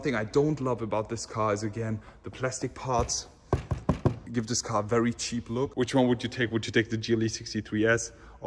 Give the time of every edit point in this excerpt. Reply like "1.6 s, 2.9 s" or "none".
4.2 s, 5.7 s